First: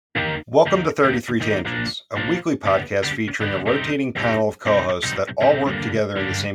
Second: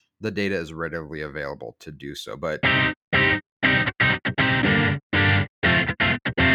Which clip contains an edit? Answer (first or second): second